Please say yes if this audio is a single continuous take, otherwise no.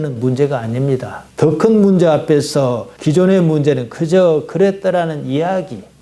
no